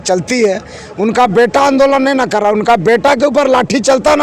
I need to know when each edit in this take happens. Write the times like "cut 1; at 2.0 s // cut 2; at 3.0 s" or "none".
none